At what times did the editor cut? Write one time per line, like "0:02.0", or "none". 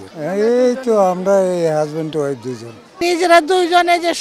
0:03.0